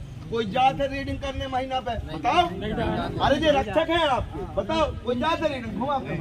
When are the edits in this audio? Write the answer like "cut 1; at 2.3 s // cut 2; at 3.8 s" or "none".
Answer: none